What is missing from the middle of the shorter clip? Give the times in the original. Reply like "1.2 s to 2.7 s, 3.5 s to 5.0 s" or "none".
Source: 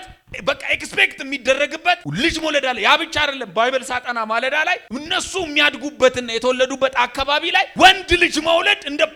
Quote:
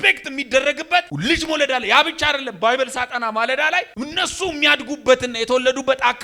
none

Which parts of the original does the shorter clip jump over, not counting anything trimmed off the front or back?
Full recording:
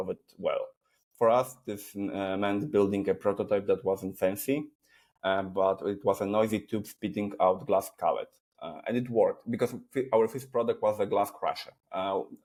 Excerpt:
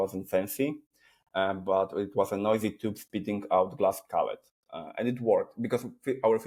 none

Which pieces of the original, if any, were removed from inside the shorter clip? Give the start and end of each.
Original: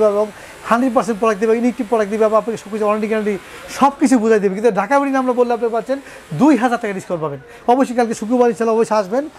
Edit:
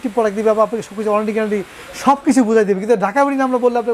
none

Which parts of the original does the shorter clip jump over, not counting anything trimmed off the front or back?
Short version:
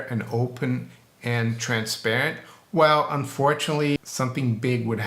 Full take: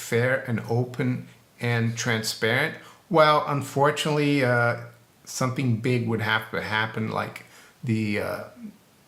4.3 s to 5.2 s

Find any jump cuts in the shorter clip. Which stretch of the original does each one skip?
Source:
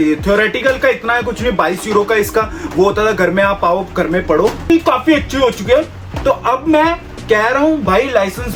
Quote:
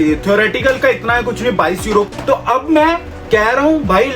2.1 s to 6.0 s

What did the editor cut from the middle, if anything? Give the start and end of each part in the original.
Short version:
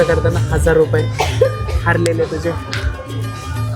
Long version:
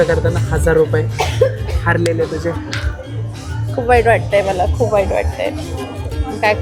none

